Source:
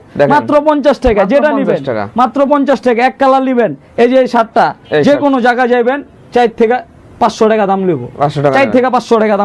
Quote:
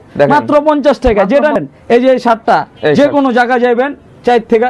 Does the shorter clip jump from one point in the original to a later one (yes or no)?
yes